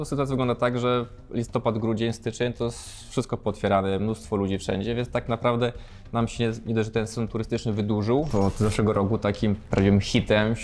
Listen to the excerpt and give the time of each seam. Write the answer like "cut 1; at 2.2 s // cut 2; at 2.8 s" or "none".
cut 1; at 8.3 s